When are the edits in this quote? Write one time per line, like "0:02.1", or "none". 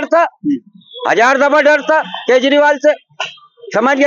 none